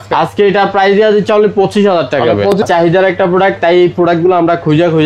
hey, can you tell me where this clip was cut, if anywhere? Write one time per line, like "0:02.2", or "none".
0:02.6